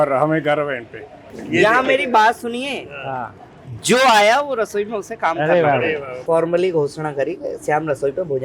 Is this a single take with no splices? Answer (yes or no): no